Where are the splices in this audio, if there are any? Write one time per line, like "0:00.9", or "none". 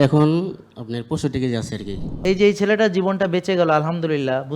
0:02.2